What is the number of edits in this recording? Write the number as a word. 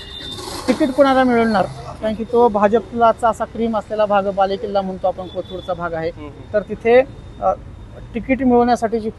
zero